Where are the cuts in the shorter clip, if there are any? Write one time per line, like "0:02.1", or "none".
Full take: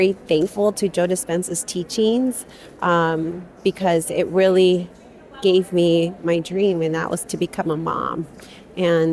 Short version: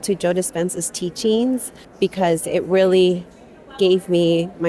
0:01.8